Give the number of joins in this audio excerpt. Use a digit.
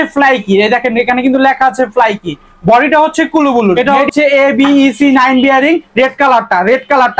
1